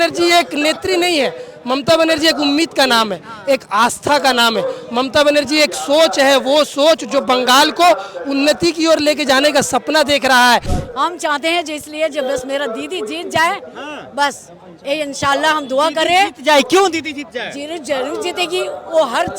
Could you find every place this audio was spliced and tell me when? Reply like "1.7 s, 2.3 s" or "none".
10.7 s